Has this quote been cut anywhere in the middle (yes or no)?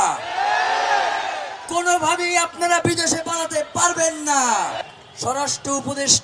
yes